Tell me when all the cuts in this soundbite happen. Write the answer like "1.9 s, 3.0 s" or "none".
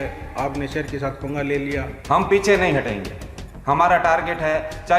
1.9 s